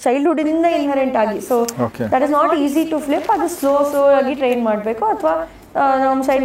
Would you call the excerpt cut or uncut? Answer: uncut